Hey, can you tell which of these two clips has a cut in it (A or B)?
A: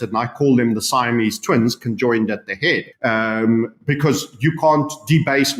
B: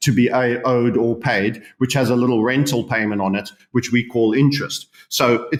A